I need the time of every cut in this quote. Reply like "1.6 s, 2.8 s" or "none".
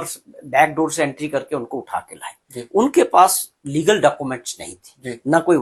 none